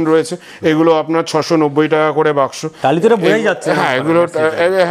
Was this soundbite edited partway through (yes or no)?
no